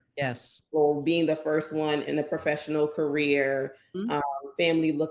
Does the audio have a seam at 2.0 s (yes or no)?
yes